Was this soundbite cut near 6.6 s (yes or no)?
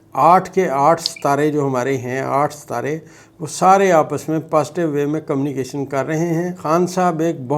yes